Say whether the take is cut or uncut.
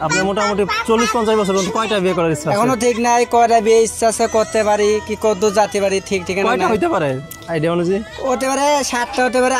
uncut